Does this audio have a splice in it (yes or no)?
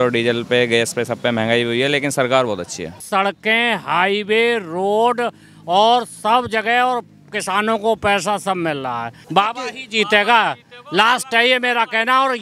yes